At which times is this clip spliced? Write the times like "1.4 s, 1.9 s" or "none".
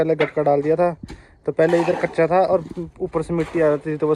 none